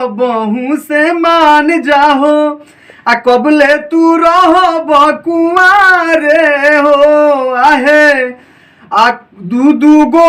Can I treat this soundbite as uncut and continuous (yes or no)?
yes